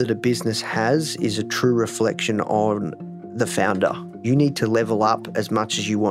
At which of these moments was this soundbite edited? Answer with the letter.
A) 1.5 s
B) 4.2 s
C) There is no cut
B